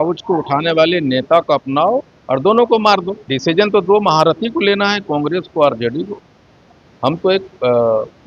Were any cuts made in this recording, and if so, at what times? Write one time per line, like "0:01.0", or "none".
0:03.2